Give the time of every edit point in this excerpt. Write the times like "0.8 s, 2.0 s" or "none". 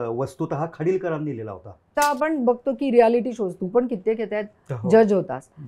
1.9 s